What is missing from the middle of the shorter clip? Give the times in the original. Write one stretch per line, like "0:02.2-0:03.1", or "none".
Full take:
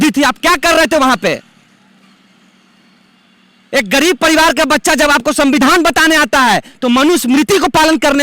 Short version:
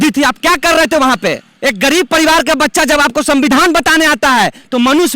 0:01.5-0:03.6

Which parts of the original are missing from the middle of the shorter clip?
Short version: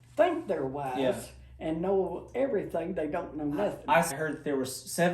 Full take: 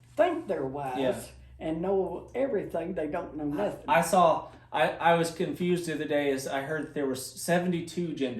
0:04.1-0:06.6

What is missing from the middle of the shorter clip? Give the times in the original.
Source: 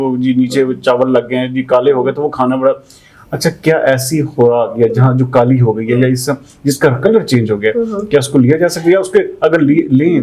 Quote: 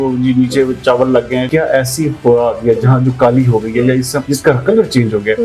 0:01.5-0:03.6
0:06.4-0:06.6

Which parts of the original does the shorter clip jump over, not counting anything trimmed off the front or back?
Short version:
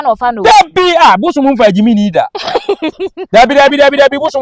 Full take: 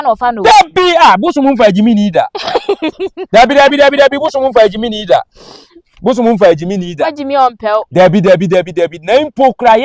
none

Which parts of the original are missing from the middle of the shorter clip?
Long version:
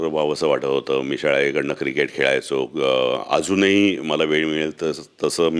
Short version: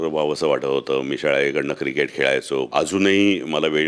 0:02.7-0:03.3

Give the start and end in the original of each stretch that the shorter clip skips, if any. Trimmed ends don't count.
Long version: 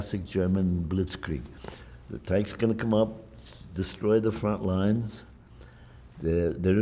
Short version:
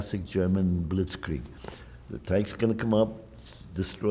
none

